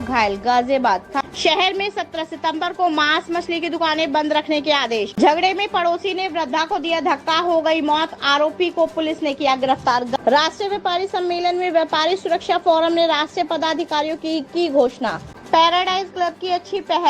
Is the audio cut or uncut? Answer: cut